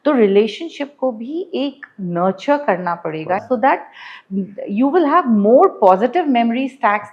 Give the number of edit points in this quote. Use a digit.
1